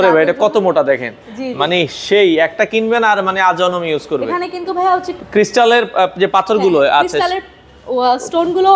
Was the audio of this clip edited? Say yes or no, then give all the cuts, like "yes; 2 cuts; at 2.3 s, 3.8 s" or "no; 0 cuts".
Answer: no; 0 cuts